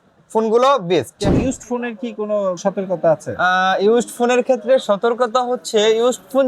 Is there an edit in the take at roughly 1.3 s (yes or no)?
yes